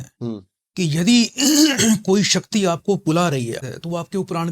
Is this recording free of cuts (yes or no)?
no